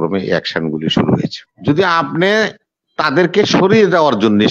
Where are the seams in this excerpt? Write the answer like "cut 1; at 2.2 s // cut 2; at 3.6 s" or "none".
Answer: cut 1; at 1.5 s